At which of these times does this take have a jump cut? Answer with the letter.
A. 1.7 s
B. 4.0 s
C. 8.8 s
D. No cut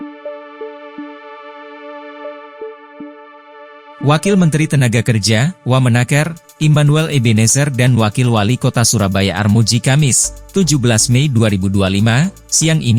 B